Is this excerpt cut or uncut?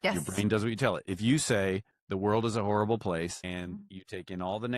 uncut